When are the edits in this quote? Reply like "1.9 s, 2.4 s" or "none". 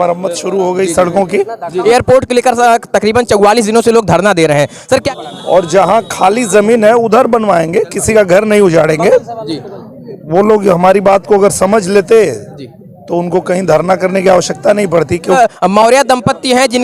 1.7 s, 5.0 s, 15.4 s